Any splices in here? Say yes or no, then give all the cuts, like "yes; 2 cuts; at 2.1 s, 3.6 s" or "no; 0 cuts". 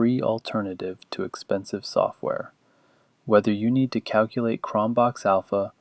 yes; 1 cut; at 1.0 s